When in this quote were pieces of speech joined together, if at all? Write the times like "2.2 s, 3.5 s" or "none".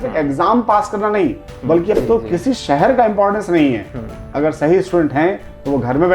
2.0 s

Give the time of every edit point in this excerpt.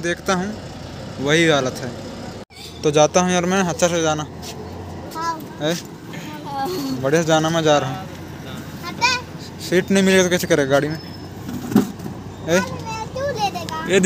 2.3 s

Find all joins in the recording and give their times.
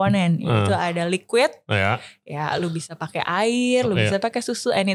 none

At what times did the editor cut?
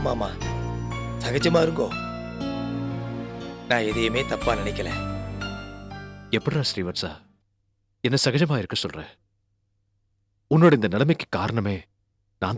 none

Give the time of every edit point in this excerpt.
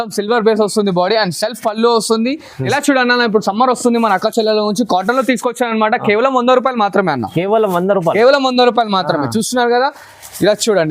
2.6 s

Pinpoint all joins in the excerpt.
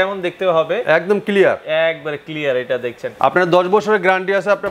3.0 s

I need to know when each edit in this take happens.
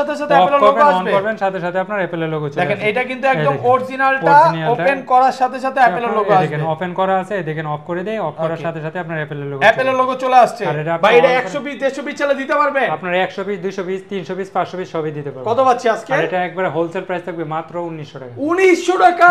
none

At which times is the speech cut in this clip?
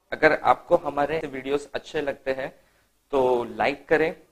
1.2 s

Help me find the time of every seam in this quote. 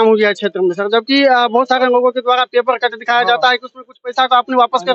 none

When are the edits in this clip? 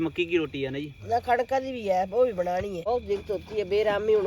2.9 s

